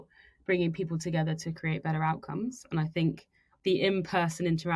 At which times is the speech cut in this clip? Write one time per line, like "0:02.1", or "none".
0:03.4